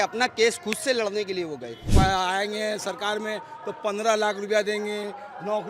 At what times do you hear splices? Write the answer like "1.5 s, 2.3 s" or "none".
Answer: 1.9 s

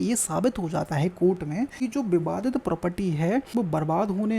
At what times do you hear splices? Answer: 1.7 s, 3.5 s

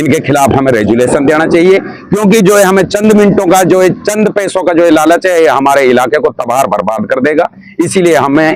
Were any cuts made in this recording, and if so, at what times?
none

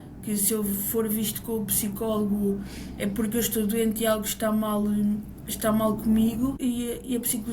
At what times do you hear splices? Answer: 6.6 s

